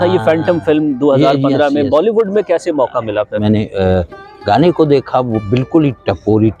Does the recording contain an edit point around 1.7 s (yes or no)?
no